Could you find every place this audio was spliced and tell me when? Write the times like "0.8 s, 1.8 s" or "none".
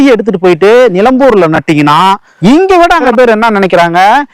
2.3 s, 3.1 s